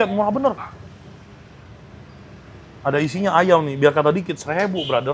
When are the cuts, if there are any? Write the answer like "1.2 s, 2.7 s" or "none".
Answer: none